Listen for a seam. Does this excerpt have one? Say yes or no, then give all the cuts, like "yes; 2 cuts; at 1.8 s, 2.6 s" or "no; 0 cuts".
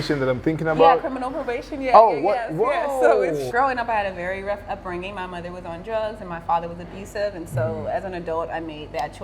yes; 1 cut; at 3.5 s